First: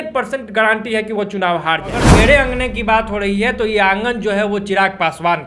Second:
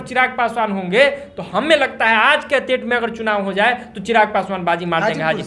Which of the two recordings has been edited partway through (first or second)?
first